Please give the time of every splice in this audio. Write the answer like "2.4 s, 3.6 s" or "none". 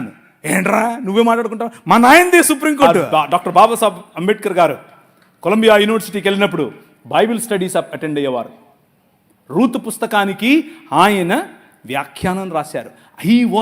3.0 s